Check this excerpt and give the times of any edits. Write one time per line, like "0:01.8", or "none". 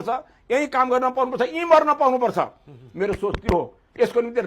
none